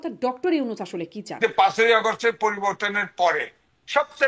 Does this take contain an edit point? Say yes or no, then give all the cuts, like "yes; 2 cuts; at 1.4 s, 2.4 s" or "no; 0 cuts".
yes; 1 cut; at 1.4 s